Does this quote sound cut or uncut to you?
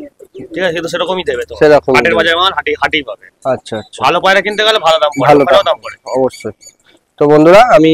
uncut